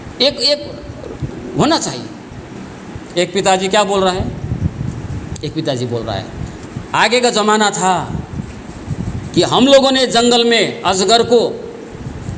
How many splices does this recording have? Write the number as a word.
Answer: one